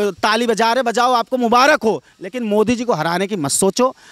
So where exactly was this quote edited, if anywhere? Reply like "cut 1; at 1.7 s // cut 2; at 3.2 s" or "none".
none